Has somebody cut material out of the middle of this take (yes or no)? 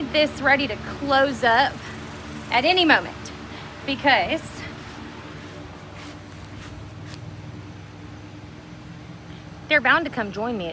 no